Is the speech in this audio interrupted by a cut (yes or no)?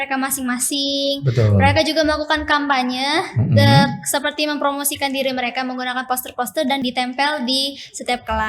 yes